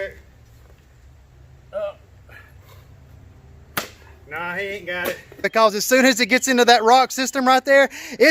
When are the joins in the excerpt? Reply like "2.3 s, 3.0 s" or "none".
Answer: 5.4 s